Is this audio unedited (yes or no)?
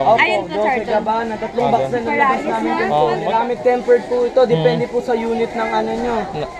no